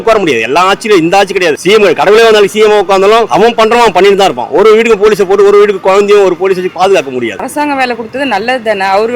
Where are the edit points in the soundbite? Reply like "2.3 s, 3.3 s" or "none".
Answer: 7.3 s